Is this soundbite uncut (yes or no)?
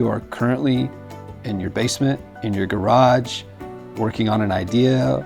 yes